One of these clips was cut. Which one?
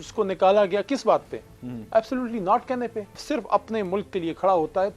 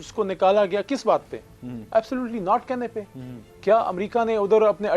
first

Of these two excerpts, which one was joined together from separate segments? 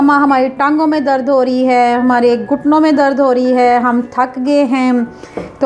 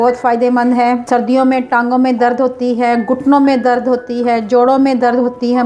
second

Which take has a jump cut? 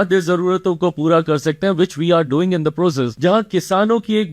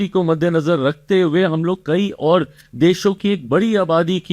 first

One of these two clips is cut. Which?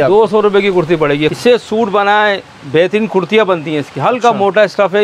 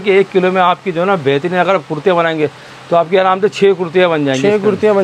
first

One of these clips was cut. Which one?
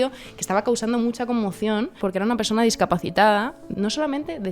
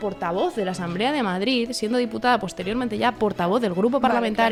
first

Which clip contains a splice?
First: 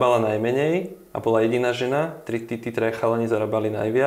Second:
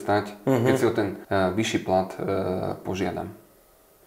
second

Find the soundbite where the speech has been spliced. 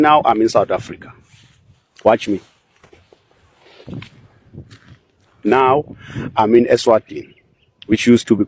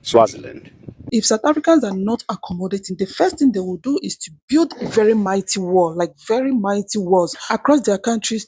second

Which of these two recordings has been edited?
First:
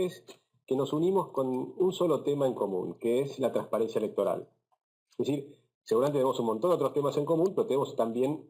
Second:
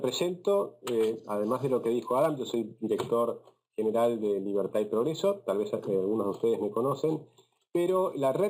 first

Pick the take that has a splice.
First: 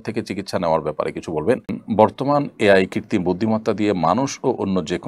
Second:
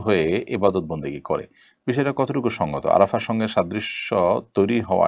first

